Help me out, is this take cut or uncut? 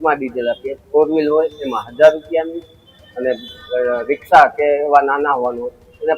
uncut